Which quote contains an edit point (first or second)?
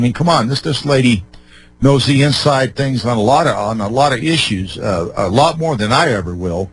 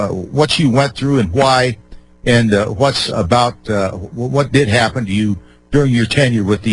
first